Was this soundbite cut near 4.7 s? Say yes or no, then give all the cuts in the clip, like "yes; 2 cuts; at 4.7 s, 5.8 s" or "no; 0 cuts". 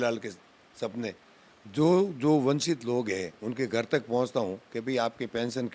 no; 1 cut; at 1.3 s